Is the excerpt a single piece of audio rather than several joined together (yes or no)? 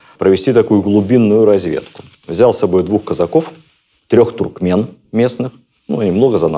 yes